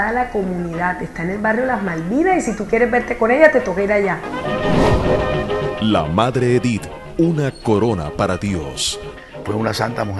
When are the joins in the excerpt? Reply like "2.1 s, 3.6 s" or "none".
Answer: 4.1 s, 7.3 s